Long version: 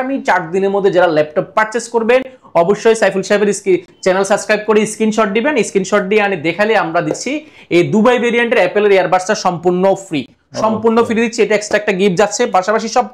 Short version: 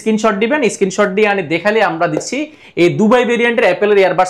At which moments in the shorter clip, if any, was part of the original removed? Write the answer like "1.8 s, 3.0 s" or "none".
none

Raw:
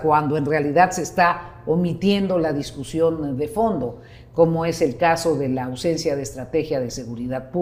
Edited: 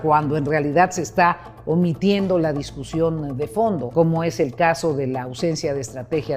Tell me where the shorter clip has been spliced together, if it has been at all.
3.9 s

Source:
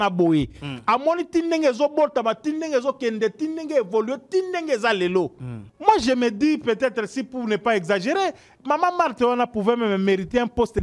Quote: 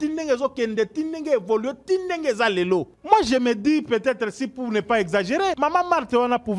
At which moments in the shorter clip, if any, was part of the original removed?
2.9 s, 5.6 s

